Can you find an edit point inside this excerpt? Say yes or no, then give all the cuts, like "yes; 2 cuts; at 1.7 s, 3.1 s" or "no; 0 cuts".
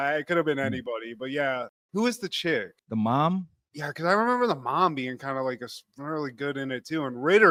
no; 0 cuts